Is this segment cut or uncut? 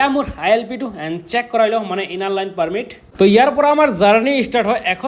cut